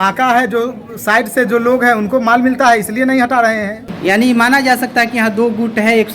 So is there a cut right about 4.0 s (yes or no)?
yes